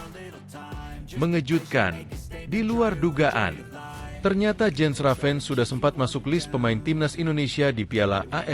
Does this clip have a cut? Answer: yes; 1 cut; at 1.1 s

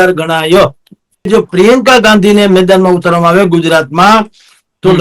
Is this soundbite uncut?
no; 1 cut; at 1.3 s

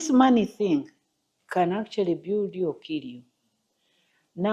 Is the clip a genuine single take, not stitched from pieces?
yes; 0 cuts

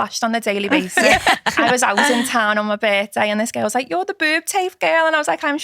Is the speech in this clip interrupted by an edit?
yes; 1 cut; at 1.4 s

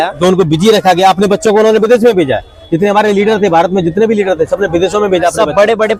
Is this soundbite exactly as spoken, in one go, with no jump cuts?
yes; 0 cuts

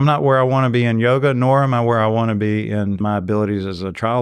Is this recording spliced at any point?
yes; 1 cut; at 3.0 s

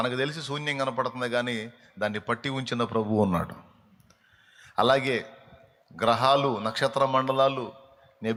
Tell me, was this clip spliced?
no; 0 cuts

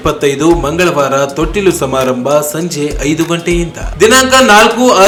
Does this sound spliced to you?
no; 0 cuts

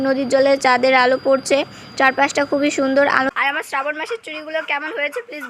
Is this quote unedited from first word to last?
no; 1 cut; at 3.3 s

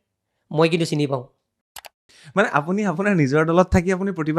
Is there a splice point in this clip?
yes; 1 cut; at 2.0 s

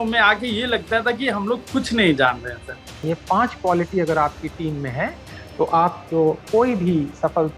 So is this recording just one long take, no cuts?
no; 1 cut; at 3.0 s

